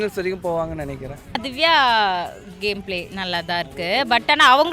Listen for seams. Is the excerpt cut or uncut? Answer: cut